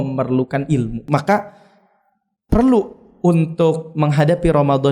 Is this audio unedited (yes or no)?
no